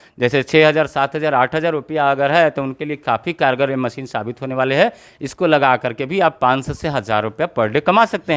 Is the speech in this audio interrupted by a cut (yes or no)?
no